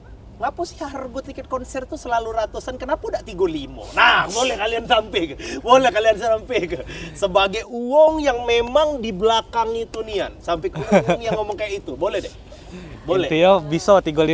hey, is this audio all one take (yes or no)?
yes